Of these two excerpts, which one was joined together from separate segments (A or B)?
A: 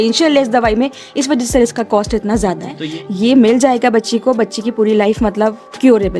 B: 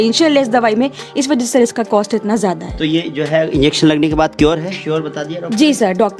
A